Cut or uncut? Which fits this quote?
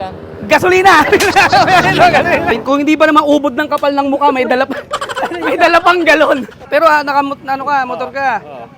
cut